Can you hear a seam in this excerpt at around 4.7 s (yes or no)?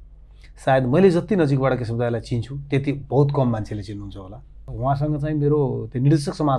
yes